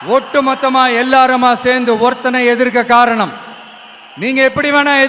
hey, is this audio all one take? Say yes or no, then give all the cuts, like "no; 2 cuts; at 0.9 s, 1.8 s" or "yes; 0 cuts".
yes; 0 cuts